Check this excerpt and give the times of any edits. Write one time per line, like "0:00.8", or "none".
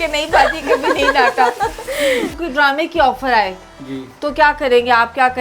0:02.3

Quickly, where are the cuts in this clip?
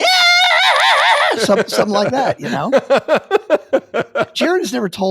0:02.2
0:04.3

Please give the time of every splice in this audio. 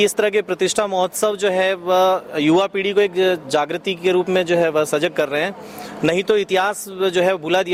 none

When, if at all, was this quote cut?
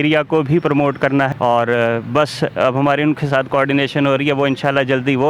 0:01.3

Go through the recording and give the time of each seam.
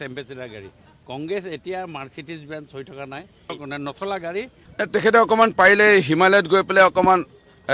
0:03.6
0:04.6

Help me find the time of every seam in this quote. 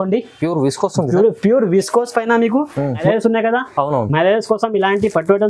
0:03.0

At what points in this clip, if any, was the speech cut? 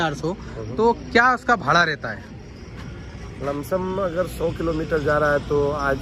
none

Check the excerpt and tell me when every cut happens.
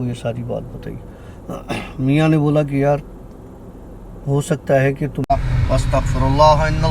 0:05.2

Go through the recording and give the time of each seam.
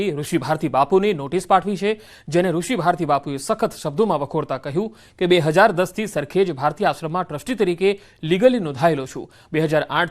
0:05.6

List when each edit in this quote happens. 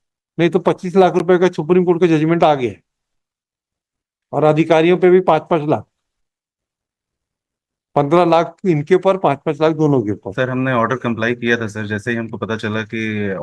none

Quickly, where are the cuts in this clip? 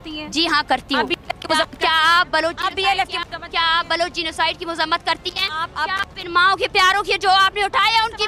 none

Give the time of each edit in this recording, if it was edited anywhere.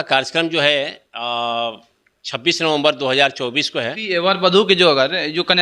0:04.0

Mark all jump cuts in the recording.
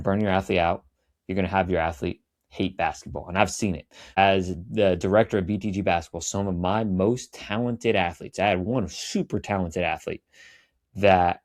none

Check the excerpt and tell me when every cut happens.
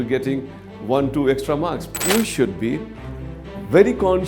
0:02.0

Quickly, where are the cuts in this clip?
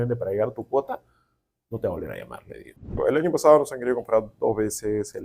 0:03.0

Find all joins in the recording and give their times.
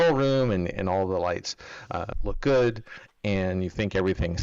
none

